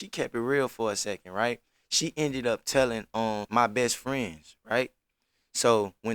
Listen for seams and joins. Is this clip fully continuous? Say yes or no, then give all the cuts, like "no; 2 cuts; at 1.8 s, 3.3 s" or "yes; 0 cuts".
no; 1 cut; at 3.4 s